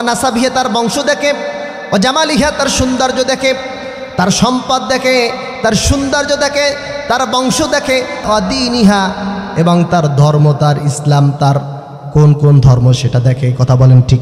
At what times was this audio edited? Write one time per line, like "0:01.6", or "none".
0:08.2